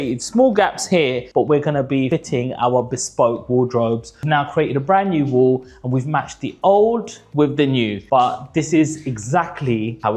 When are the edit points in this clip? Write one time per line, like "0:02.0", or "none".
0:04.2
0:08.0